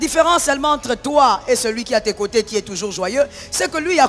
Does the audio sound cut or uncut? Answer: uncut